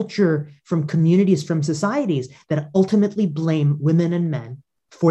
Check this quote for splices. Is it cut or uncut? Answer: uncut